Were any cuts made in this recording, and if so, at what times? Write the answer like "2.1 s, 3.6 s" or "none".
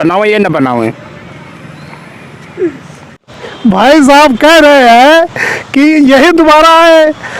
3.2 s